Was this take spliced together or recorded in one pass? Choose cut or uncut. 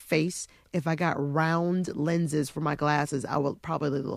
uncut